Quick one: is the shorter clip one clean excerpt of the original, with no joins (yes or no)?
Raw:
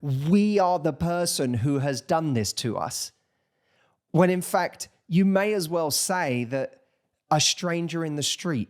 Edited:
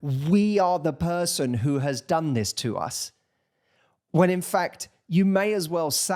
yes